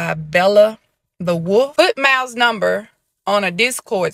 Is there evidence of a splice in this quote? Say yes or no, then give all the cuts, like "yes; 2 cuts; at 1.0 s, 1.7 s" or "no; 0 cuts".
yes; 1 cut; at 1.7 s